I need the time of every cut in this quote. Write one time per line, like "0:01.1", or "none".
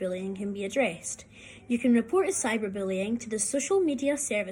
none